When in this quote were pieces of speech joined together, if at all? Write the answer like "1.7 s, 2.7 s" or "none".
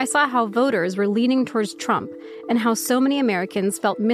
none